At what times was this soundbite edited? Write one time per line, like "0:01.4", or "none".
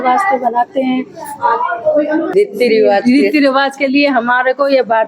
0:02.3